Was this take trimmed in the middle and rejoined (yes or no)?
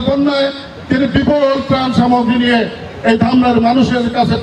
no